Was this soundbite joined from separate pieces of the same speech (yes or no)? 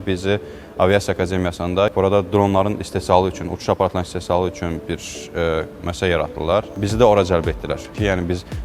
yes